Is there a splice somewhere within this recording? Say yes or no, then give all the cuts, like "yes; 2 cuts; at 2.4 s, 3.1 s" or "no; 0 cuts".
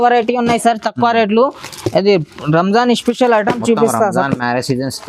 no; 0 cuts